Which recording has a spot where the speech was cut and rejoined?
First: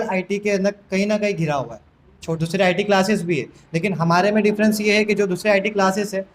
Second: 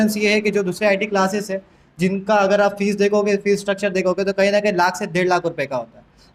first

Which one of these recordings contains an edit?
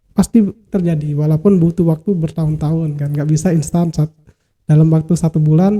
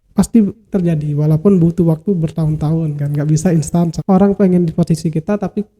second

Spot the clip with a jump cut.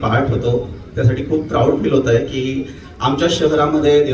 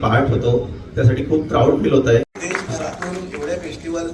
second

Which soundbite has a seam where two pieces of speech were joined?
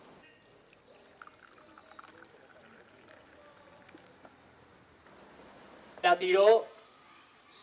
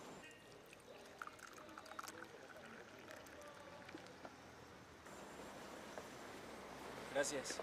second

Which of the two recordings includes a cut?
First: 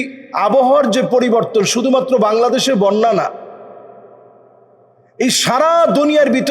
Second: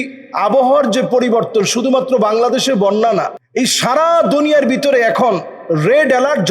second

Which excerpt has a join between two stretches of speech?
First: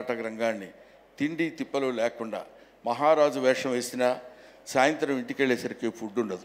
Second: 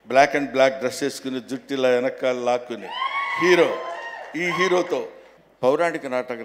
second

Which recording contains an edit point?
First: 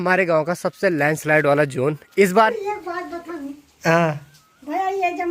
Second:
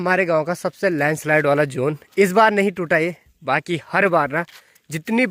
first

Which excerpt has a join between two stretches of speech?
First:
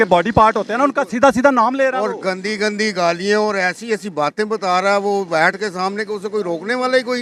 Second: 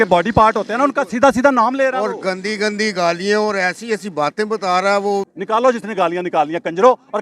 second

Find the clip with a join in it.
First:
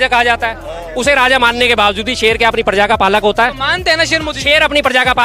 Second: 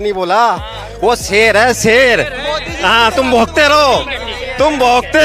second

